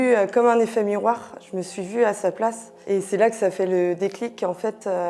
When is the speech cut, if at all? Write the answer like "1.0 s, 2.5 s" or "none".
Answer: none